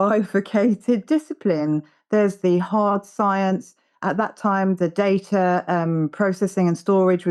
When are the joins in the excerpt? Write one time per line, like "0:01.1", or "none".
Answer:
none